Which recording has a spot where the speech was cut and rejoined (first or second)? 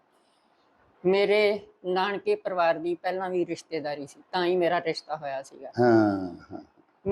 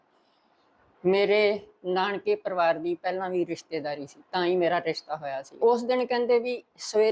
second